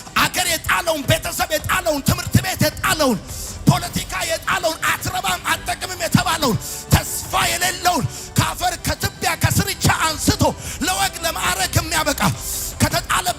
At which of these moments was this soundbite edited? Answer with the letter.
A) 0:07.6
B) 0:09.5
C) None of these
C